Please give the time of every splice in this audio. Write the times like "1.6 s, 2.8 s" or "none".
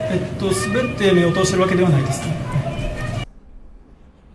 3.2 s